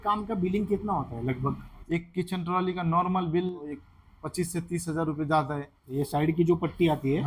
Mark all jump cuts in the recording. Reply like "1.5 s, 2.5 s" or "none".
3.9 s, 6.0 s